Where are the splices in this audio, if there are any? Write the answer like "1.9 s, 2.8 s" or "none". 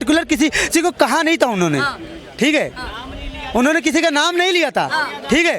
none